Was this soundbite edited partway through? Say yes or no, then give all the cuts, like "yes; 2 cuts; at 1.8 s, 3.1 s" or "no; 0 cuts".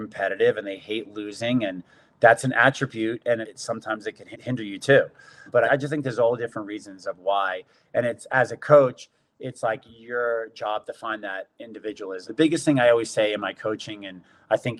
no; 0 cuts